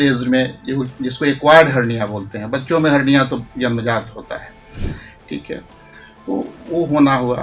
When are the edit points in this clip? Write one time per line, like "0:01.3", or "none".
none